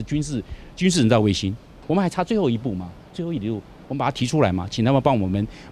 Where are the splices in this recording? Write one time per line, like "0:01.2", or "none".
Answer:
0:01.8